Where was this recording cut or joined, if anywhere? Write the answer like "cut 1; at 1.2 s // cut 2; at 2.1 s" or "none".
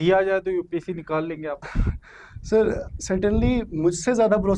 none